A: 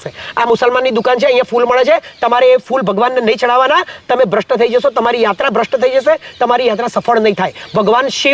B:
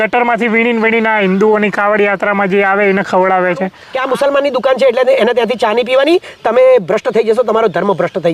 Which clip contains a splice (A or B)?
B